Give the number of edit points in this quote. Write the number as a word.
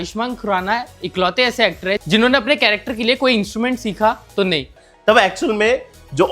one